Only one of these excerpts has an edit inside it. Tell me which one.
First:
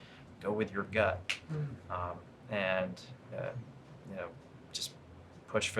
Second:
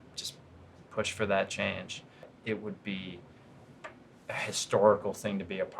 second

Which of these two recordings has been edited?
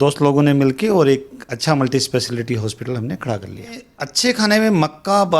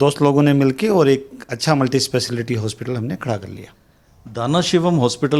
first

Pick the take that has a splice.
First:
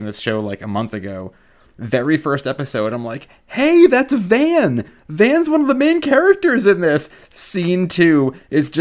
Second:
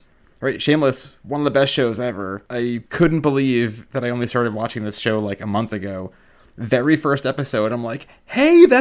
second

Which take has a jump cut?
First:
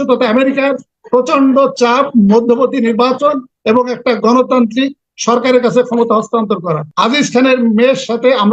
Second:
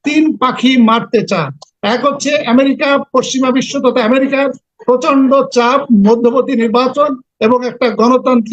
first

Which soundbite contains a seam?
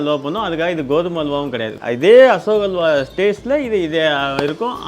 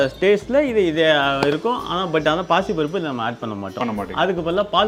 first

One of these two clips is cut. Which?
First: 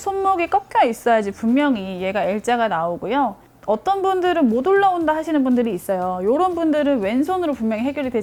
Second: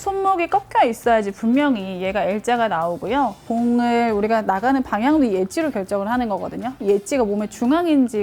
second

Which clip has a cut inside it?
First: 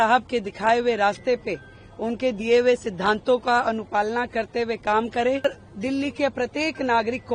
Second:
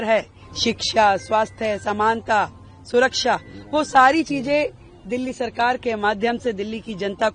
first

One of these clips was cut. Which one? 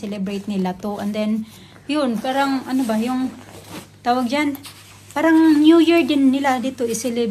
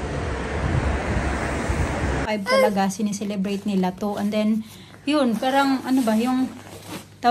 second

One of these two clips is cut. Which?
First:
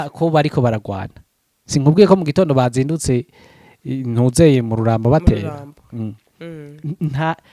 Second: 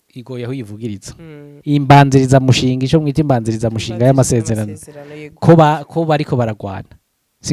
second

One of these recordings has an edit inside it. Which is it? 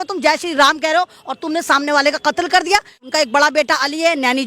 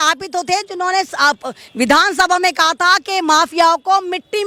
first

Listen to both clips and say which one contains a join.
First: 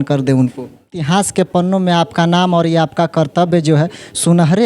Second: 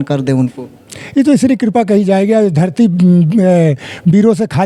first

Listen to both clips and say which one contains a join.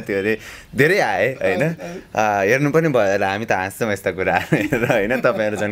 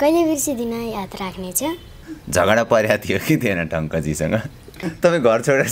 second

